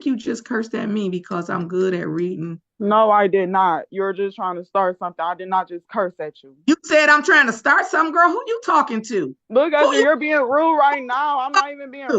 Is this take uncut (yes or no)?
no